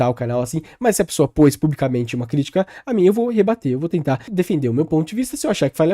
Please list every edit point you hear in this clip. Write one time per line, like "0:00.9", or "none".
0:04.2